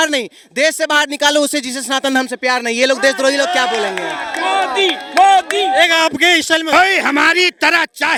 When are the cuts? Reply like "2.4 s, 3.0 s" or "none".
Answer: none